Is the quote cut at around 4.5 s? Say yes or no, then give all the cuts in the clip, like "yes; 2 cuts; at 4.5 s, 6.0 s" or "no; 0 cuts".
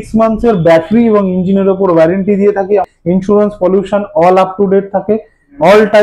no; 1 cut; at 2.9 s